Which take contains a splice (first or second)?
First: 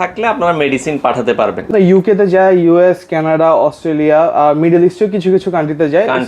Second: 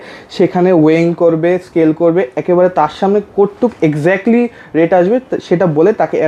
first